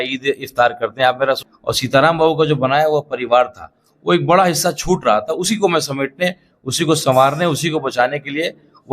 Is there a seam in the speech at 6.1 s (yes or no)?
no